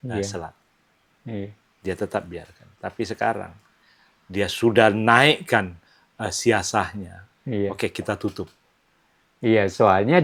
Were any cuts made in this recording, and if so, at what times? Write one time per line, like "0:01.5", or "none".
none